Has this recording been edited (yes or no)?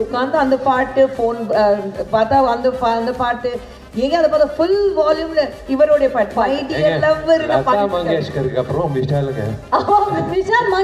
no